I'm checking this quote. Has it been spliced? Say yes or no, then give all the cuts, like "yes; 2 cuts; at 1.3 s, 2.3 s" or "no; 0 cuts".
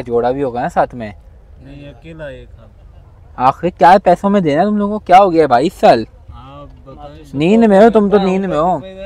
no; 0 cuts